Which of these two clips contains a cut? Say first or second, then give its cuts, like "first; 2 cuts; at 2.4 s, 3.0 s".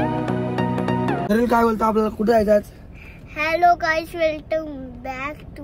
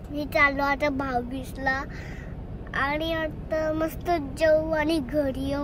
first; 1 cut; at 1.2 s